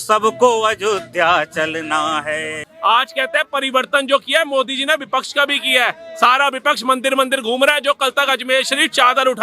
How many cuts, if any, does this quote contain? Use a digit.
1